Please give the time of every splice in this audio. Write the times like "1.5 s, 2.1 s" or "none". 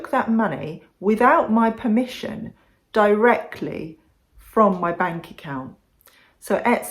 5.8 s